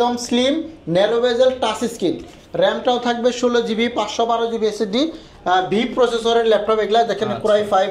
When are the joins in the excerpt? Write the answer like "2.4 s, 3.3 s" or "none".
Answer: none